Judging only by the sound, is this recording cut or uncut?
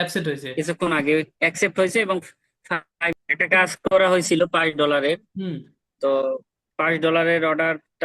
cut